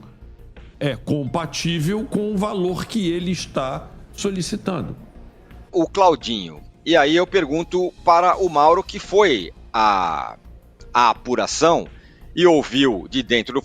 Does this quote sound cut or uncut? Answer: cut